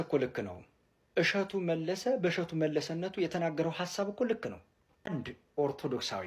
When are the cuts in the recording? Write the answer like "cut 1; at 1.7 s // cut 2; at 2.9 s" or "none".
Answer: cut 1; at 5.4 s